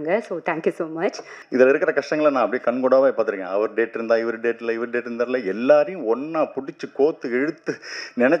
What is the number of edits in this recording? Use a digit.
1